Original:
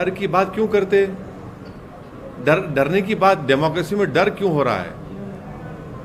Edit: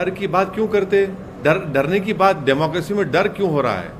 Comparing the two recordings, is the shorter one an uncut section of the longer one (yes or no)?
no